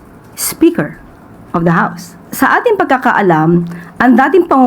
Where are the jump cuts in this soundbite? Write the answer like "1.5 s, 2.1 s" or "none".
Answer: 2.2 s

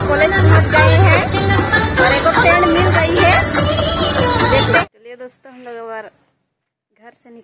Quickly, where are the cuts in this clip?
4.8 s

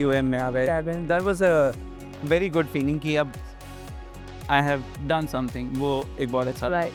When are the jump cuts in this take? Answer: none

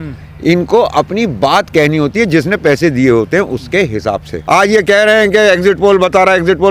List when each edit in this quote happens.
4.3 s

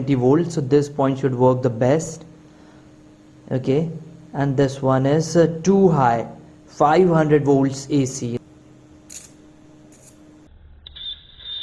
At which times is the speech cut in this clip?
8.4 s

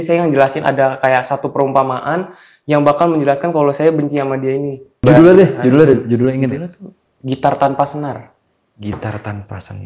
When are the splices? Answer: 5.0 s

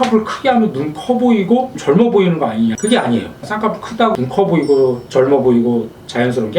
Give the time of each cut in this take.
2.8 s, 3.4 s

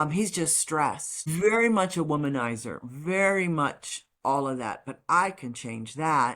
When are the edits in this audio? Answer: 1.3 s

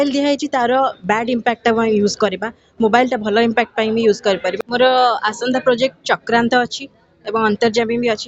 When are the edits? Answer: 4.6 s

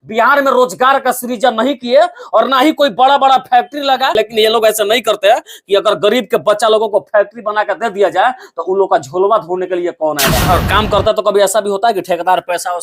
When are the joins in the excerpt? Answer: 4.2 s, 10.4 s

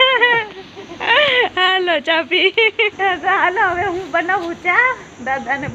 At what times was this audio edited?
2.9 s

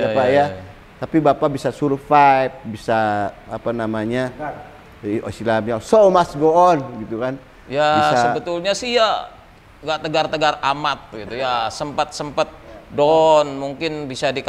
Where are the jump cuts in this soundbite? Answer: none

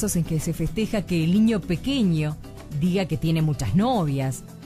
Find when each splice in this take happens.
none

